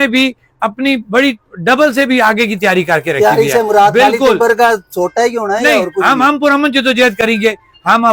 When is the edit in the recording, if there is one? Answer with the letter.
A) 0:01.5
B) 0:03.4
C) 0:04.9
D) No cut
D